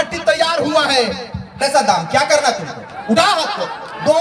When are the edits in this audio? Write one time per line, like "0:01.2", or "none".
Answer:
0:01.6